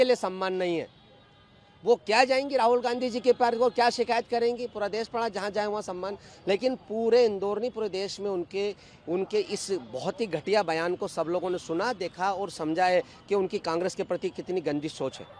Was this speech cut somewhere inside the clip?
no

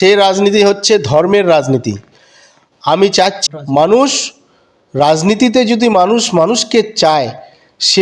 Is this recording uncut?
no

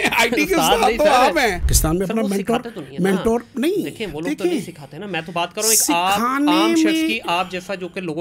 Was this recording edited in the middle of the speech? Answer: yes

